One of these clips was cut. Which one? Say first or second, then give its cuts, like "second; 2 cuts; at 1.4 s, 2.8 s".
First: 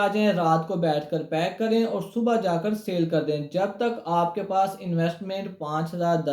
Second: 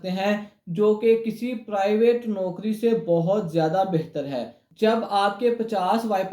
second; 1 cut; at 4.6 s